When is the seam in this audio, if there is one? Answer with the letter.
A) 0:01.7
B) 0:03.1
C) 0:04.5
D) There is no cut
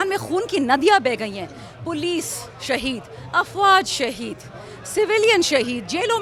D